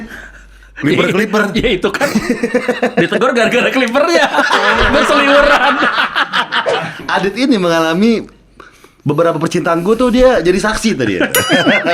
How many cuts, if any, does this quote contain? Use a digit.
1